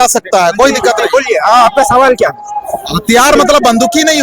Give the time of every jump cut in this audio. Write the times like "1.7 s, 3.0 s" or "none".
none